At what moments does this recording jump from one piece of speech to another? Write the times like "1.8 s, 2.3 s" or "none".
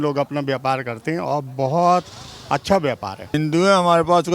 3.3 s